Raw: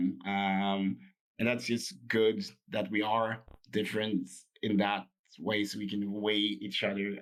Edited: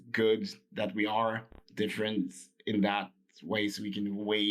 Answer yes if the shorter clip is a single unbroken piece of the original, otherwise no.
yes